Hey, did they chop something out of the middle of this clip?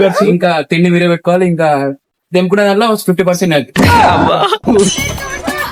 no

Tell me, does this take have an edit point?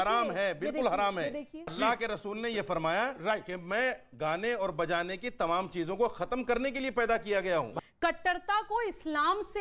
yes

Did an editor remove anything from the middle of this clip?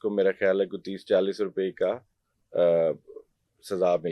no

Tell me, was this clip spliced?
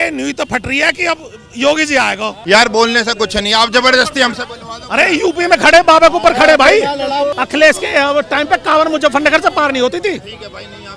yes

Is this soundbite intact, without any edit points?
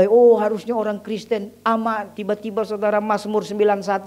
no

